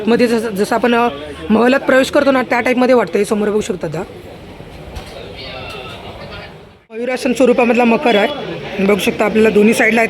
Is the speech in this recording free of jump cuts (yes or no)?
no